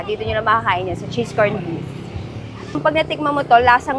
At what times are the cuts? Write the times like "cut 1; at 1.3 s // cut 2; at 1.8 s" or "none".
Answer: cut 1; at 2.8 s